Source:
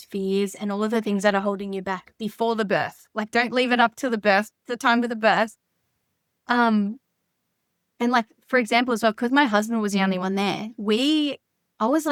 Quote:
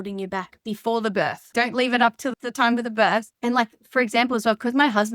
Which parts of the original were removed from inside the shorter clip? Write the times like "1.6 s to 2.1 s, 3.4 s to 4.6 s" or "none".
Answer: 3.0 s to 3.2 s, 4.1 s to 4.6 s, 5.6 s to 7.9 s